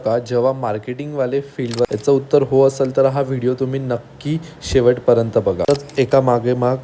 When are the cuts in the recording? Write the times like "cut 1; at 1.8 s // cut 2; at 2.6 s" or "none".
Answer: cut 1; at 1.8 s // cut 2; at 5.7 s